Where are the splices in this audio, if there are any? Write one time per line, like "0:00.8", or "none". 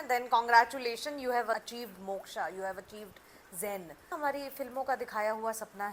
0:04.1